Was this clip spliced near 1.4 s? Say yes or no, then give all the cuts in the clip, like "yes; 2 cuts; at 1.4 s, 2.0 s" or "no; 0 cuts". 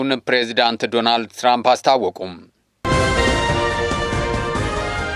no; 1 cut; at 2.7 s